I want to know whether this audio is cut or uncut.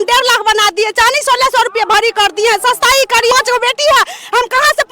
cut